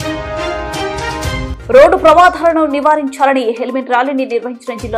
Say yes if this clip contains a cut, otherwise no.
yes